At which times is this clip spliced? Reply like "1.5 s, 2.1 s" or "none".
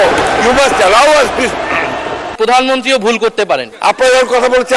2.3 s, 3.7 s